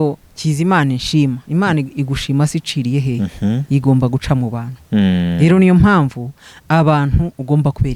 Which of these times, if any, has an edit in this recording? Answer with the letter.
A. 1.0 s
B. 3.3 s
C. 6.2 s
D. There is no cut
D